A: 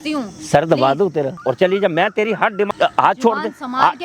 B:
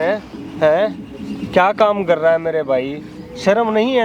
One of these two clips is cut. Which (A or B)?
A